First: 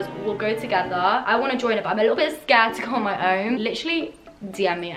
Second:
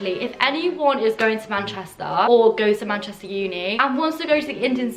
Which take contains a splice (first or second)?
second